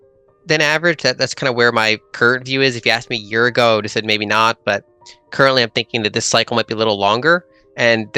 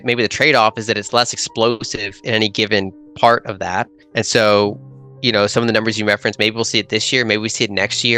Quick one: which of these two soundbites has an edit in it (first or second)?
second